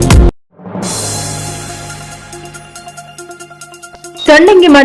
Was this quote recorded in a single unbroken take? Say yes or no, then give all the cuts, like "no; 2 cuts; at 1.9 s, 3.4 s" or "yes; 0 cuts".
no; 1 cut; at 3.7 s